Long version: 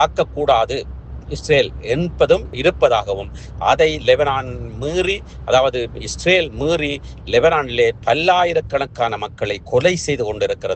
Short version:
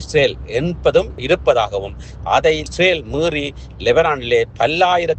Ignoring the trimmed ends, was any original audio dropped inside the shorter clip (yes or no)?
yes